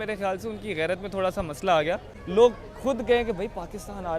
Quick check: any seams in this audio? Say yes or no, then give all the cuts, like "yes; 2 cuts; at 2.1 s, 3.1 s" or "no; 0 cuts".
yes; 1 cut; at 2.1 s